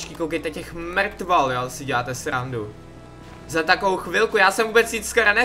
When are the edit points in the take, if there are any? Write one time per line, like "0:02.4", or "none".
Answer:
none